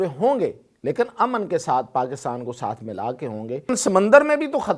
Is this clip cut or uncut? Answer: cut